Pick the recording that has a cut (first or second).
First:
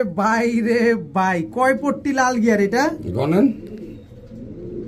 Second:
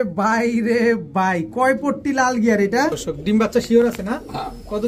second